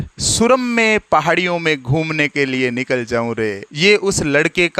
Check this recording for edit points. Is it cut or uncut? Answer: cut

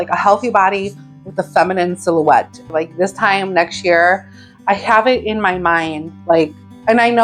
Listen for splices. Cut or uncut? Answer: cut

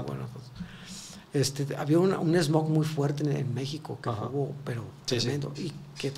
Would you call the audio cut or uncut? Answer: uncut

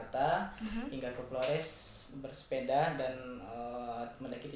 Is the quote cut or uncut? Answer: uncut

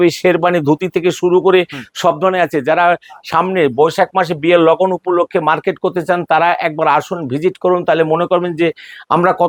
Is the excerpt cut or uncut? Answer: uncut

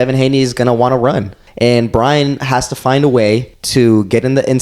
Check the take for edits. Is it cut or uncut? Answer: cut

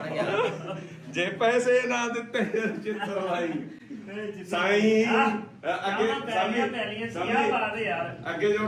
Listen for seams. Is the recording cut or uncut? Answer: uncut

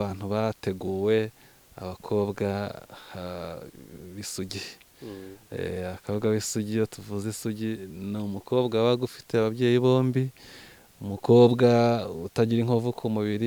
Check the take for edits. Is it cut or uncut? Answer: uncut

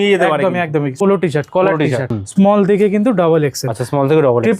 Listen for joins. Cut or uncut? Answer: cut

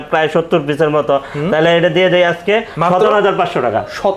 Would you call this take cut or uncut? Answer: uncut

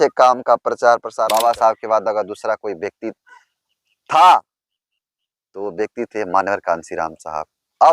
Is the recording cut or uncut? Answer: cut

